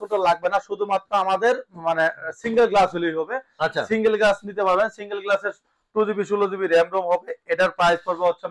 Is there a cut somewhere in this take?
no; 0 cuts

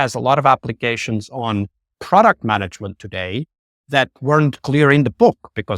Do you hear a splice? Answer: yes; 1 cut; at 1.9 s

